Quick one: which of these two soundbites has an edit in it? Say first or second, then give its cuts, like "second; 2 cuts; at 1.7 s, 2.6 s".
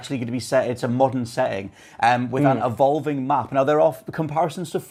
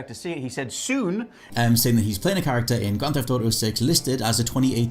second; 1 cut; at 1.4 s